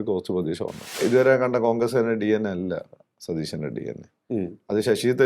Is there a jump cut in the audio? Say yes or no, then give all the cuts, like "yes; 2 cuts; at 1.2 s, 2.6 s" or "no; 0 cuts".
yes; 1 cut; at 1.0 s